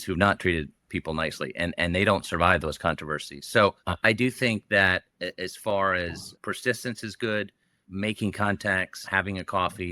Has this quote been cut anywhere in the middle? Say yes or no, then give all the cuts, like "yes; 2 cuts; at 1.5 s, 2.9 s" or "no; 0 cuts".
yes; 4 cuts; at 3.9 s, 6.2 s, 7.8 s, 9.1 s